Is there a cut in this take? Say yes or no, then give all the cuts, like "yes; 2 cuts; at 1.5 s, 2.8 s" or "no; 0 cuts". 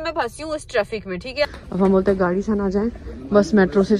yes; 1 cut; at 1.5 s